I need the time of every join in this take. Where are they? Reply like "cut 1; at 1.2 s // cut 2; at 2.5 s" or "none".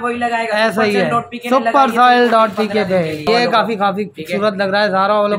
cut 1; at 3.3 s